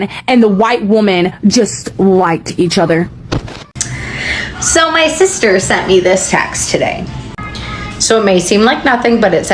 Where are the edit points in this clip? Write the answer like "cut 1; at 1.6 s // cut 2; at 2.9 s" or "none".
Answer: cut 1; at 3.9 s